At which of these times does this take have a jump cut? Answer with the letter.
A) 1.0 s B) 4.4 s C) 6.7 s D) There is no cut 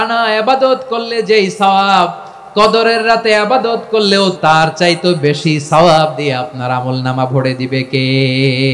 B